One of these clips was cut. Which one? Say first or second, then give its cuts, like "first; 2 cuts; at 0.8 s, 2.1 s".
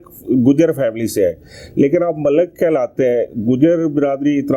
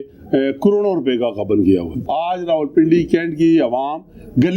second; 1 cut; at 2.0 s